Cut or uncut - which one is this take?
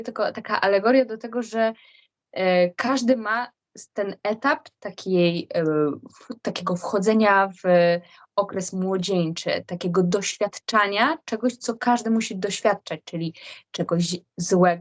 uncut